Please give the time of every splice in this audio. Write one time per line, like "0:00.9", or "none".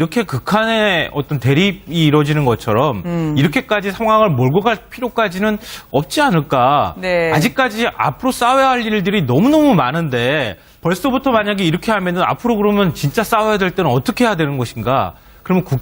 0:12.2